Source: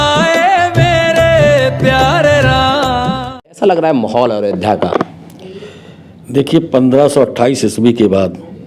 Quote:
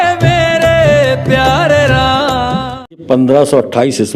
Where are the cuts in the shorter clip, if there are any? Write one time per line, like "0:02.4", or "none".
0:03.0

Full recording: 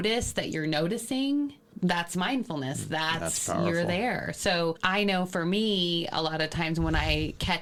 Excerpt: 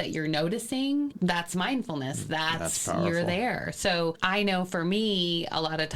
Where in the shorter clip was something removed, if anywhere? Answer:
0:01.1

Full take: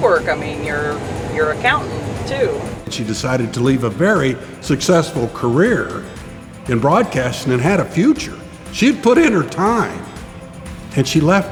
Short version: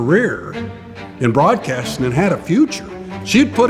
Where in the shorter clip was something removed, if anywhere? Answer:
none

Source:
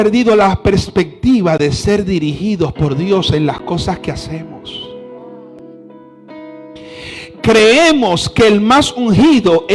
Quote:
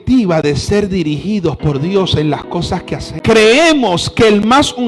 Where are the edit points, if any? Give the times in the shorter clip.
0:03.1

